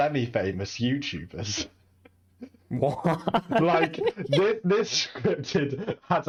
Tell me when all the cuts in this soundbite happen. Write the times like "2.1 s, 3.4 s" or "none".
none